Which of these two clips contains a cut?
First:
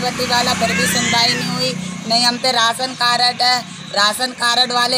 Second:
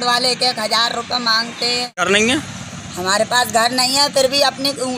second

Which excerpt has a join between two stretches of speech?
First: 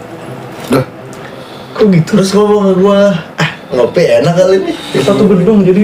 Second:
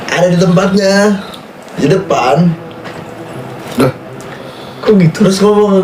first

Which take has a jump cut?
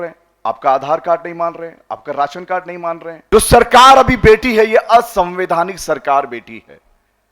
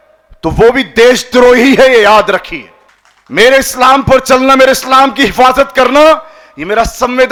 first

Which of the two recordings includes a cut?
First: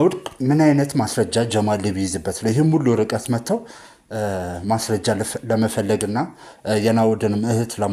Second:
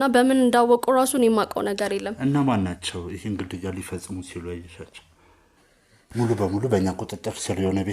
second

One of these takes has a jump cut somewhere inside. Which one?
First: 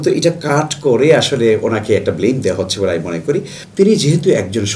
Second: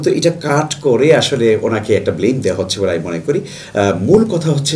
first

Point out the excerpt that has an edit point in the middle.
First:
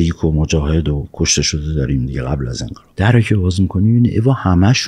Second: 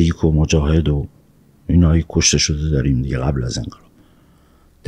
first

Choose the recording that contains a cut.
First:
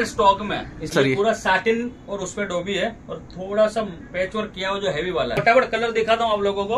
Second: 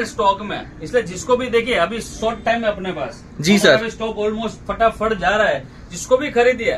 first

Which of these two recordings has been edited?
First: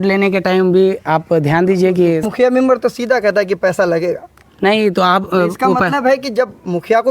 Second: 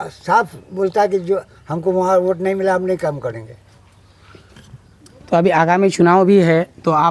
first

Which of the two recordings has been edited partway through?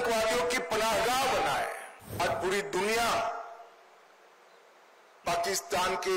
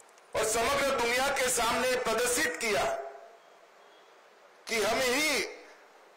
first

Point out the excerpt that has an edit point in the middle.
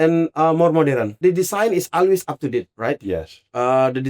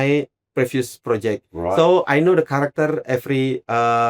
first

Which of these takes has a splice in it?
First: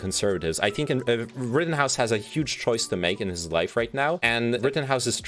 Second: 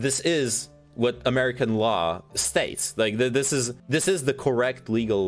second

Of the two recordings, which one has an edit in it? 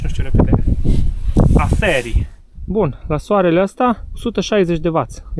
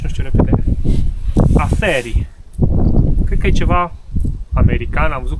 first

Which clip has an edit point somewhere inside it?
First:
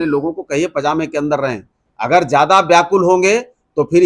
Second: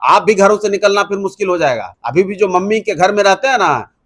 second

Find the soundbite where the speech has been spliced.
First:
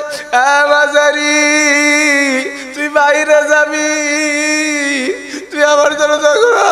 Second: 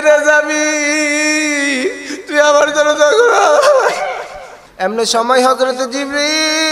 second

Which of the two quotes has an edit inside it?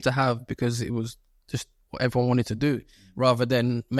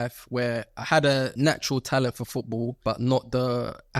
second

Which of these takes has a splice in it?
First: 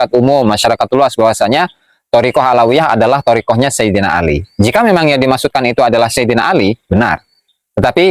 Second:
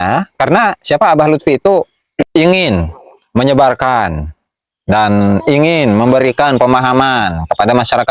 second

